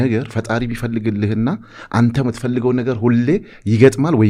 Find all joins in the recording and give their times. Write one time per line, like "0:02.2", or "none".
none